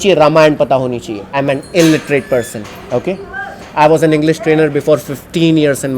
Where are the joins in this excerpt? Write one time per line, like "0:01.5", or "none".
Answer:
0:01.3